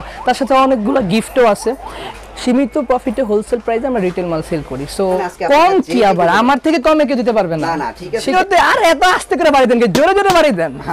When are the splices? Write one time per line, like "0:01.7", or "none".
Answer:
0:02.0
0:05.2
0:08.3